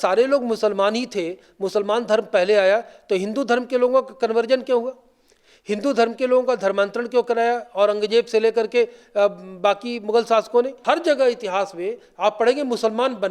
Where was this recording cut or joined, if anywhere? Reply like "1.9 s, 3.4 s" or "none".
10.7 s